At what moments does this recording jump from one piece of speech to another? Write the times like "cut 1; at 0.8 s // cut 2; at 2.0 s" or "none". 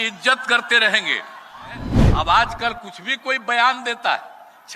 cut 1; at 1.9 s

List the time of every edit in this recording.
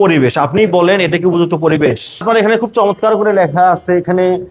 cut 1; at 2.2 s

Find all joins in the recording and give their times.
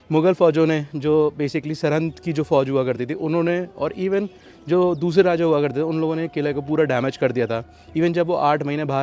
none

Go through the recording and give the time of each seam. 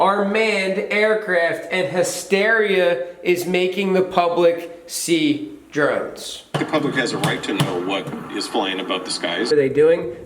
cut 1; at 6.5 s // cut 2; at 9.5 s

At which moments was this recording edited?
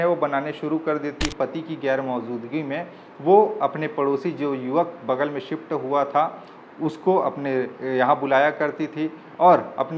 cut 1; at 1.3 s

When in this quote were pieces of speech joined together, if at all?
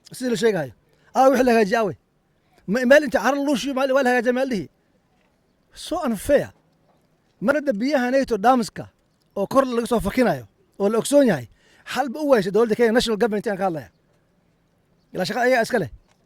cut 1; at 7.5 s

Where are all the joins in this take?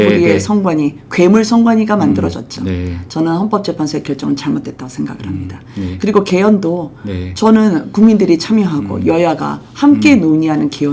none

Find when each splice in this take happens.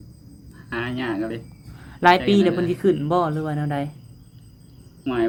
none

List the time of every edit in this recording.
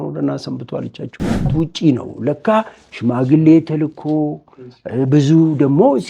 cut 1; at 1.5 s

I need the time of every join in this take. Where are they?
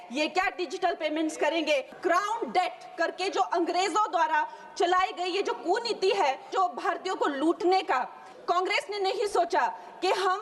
cut 1; at 1.9 s // cut 2; at 6.4 s // cut 3; at 8.3 s

